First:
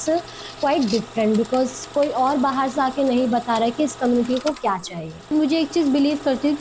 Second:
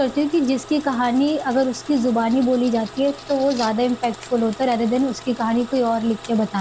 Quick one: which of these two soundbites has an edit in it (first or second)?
first